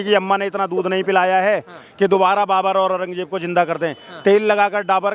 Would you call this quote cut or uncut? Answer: uncut